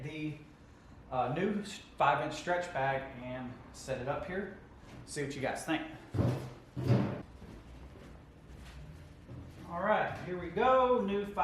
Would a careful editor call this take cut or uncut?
cut